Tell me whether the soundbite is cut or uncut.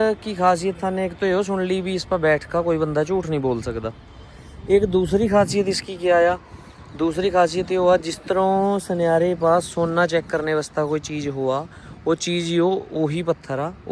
uncut